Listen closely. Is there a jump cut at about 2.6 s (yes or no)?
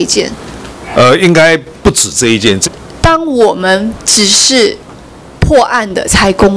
yes